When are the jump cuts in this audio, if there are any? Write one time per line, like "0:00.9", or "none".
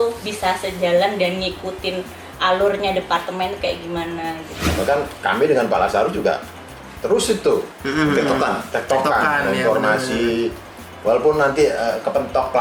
0:04.6